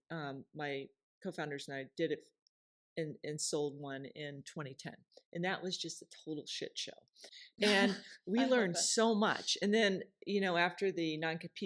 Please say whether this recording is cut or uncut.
uncut